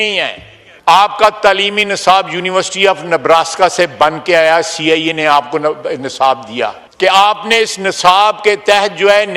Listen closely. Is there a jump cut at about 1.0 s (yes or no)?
yes